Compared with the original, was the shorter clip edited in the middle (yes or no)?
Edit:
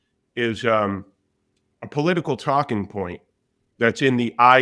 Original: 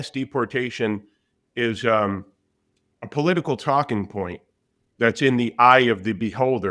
no